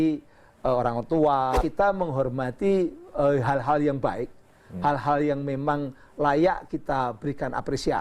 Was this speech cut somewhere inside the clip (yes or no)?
yes